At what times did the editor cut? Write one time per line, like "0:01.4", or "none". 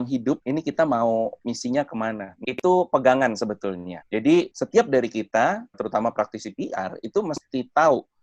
0:02.4
0:04.6
0:05.8